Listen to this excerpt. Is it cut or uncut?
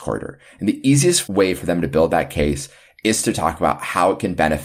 uncut